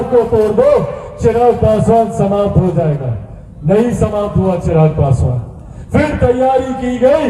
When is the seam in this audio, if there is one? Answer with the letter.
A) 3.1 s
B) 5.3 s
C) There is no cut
C